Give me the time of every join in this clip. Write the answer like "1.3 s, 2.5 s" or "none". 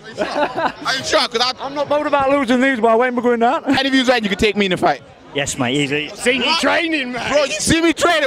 3.8 s